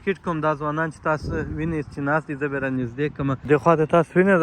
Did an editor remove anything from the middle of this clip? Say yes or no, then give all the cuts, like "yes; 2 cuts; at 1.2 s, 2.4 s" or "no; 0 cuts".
yes; 1 cut; at 3.4 s